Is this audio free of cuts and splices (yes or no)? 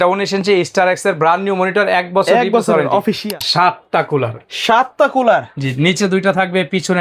no